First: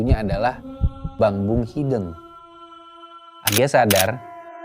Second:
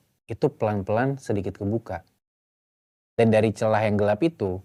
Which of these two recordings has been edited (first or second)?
first